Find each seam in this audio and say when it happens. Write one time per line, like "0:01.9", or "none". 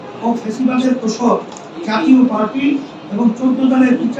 none